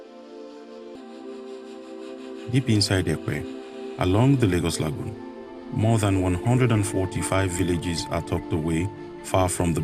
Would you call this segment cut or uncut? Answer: cut